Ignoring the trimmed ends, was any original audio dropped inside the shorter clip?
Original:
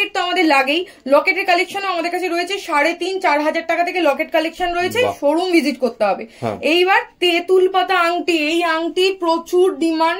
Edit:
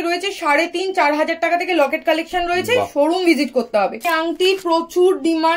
yes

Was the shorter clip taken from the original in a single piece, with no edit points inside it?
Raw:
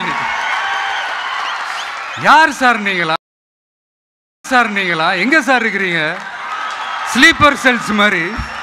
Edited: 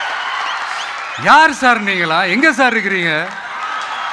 no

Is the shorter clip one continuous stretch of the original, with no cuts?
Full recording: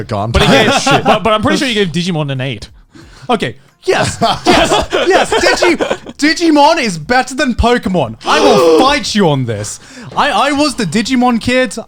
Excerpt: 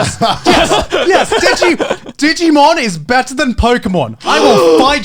yes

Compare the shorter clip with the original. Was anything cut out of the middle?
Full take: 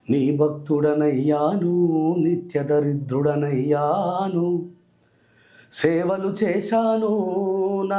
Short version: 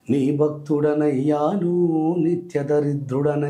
no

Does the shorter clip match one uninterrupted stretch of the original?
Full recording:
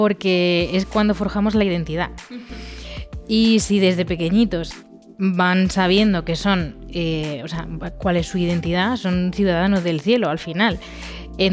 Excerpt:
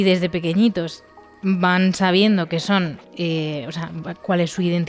yes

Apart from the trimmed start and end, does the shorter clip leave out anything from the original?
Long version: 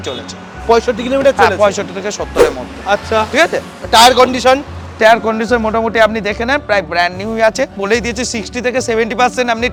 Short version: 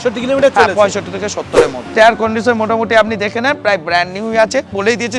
yes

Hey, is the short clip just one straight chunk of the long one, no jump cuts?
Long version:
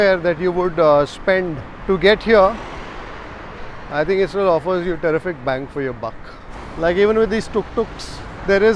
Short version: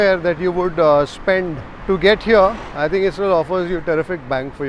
no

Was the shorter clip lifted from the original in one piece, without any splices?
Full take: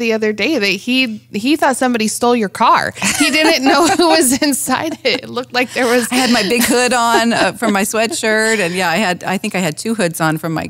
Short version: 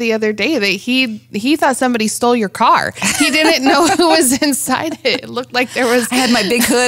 yes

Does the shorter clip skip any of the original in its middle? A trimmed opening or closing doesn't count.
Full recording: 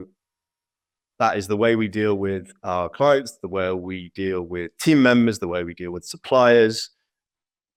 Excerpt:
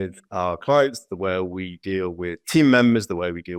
no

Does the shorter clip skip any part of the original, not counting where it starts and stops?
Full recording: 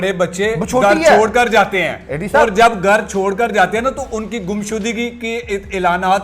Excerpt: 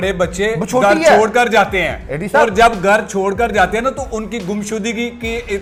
no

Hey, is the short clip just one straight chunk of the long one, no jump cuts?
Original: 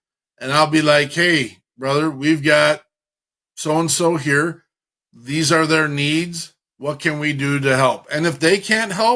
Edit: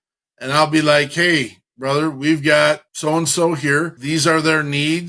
no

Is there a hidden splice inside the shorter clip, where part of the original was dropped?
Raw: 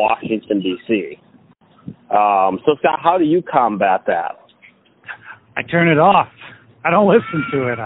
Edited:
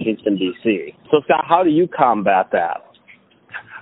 yes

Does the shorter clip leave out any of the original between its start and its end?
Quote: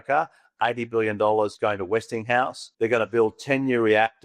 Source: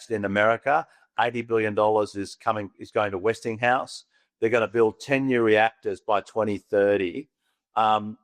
yes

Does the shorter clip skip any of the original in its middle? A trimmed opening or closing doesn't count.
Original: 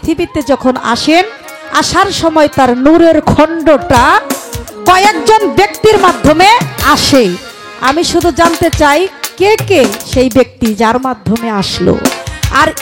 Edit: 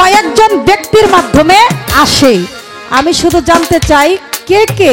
no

